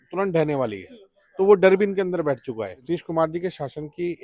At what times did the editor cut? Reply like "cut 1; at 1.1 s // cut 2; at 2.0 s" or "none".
cut 1; at 2.8 s